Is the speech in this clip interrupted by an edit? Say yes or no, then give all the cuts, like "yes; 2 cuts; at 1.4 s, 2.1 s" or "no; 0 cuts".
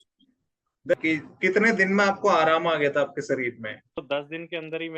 yes; 1 cut; at 0.9 s